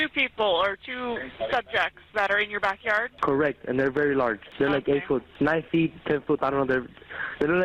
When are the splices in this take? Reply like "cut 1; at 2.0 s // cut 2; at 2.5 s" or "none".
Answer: cut 1; at 3.1 s // cut 2; at 4.5 s // cut 3; at 5.3 s